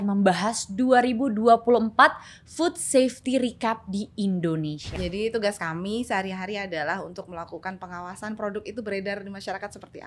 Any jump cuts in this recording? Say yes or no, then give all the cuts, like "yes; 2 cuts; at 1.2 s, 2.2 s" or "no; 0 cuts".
yes; 1 cut; at 4.8 s